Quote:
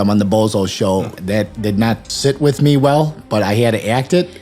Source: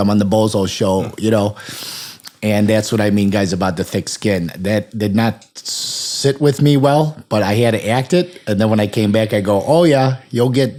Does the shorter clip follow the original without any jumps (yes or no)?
no